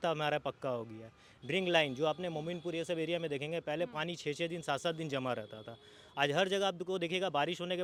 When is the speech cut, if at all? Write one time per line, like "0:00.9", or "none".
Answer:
none